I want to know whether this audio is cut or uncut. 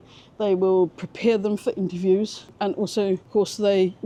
uncut